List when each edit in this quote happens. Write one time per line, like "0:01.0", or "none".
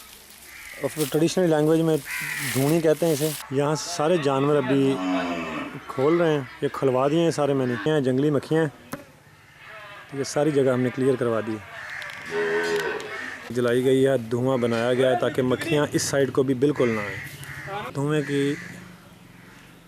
0:03.4
0:07.9
0:13.5
0:17.9